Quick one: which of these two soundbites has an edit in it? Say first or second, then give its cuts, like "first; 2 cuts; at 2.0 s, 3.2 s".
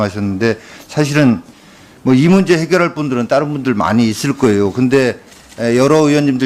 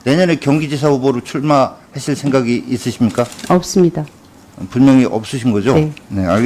second; 1 cut; at 2.6 s